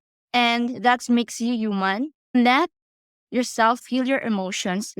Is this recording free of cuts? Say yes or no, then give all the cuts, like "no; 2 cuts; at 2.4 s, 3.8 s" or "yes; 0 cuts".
no; 1 cut; at 2.2 s